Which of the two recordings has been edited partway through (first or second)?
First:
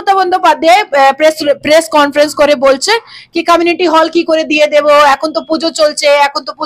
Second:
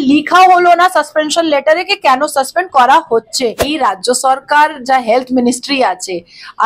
second